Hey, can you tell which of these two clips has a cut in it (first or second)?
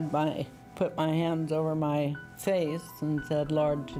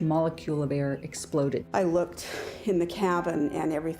second